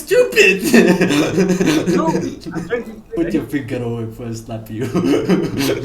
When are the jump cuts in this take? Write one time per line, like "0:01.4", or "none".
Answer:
0:03.1